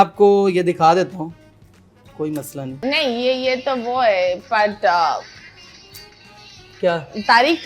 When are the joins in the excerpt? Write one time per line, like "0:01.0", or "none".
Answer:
0:02.7